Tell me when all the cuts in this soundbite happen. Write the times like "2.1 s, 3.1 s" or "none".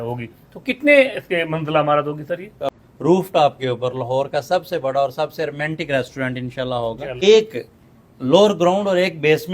2.7 s, 7.1 s